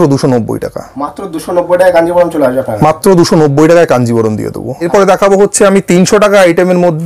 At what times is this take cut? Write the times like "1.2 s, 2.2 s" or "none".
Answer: 4.9 s